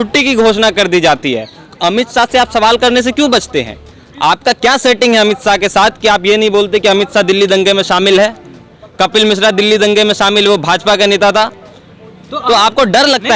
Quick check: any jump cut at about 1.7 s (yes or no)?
yes